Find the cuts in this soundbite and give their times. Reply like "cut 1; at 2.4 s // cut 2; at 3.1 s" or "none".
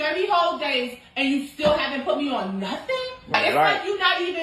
cut 1; at 0.9 s // cut 2; at 3.3 s